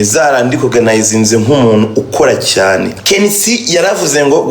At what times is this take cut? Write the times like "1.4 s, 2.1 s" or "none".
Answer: 3.0 s